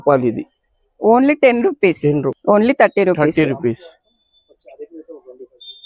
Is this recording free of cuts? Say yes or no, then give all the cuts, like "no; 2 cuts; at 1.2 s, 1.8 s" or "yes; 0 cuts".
no; 1 cut; at 2.3 s